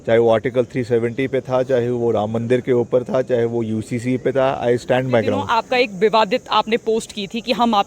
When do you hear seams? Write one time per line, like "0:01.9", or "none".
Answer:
0:05.5

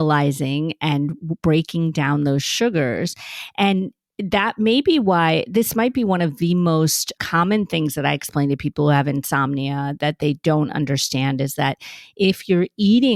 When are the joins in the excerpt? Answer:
0:07.2

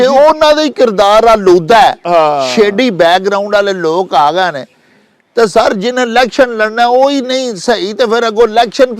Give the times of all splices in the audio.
none

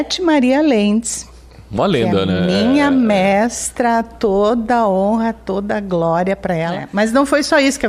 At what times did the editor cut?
0:06.8

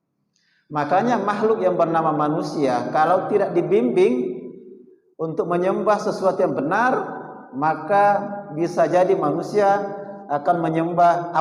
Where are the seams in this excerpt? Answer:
none

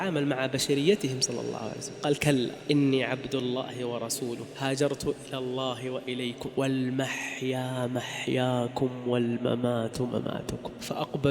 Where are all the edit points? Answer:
0:06.5

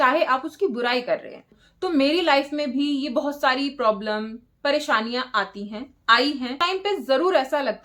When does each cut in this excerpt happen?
0:01.5
0:06.6

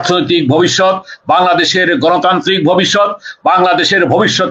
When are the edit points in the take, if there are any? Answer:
none

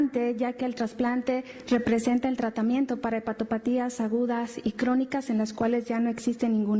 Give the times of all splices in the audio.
none

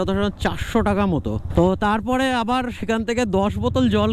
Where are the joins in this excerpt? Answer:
none

